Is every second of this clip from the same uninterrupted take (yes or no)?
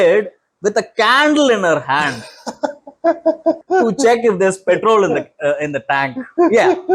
no